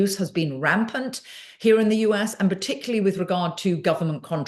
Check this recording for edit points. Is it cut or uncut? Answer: uncut